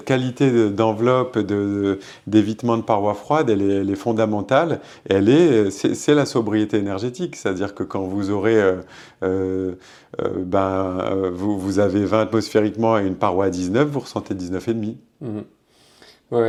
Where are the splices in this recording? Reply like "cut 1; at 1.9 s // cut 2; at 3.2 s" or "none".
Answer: none